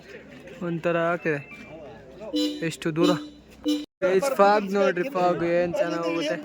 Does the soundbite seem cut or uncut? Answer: cut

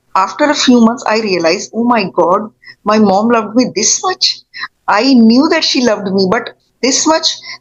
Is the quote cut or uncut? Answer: uncut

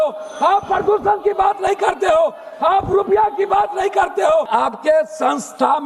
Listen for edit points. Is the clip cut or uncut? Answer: cut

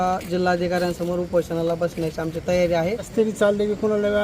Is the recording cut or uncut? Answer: cut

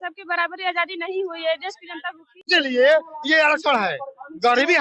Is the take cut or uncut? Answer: cut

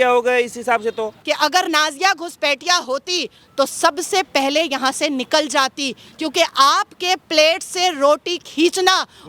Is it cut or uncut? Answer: cut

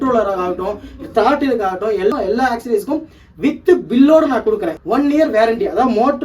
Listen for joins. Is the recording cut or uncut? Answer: cut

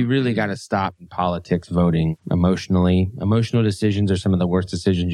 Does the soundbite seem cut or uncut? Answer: cut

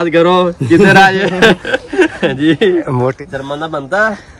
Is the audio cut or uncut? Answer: cut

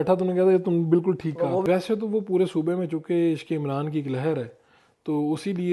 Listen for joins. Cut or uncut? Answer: cut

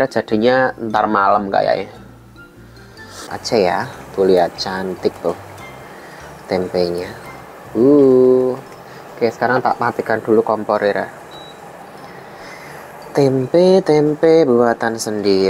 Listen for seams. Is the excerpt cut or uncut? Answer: cut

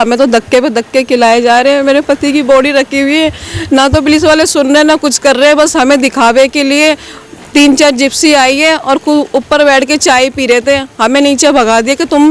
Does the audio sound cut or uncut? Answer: uncut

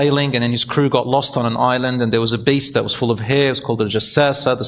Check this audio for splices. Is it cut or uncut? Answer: uncut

